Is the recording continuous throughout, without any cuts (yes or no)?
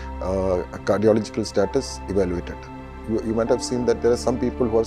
no